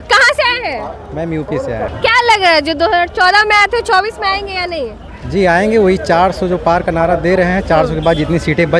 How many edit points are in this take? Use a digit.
1